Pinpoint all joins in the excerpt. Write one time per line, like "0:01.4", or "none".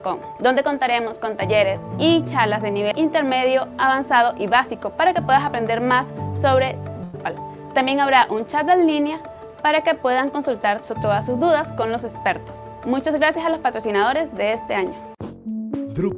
none

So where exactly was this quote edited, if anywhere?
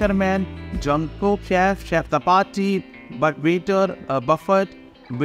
none

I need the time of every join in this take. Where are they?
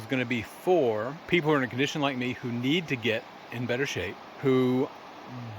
0:01.2
0:04.2

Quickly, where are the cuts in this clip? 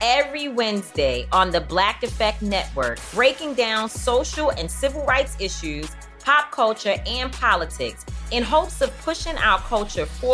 none

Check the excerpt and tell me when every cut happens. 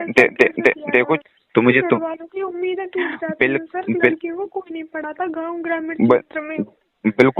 0:01.2

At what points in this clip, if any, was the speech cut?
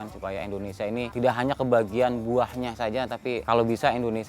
0:01.1
0:03.4

